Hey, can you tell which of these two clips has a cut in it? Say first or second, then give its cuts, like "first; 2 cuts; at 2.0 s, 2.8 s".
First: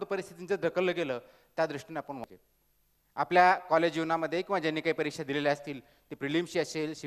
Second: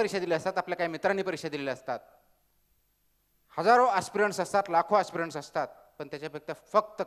first; 1 cut; at 2.2 s